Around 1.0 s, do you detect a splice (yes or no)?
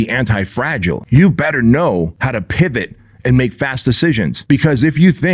yes